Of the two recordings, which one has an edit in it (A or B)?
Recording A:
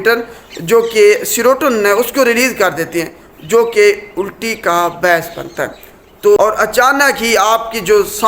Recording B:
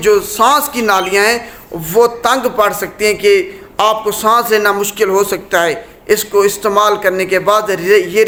A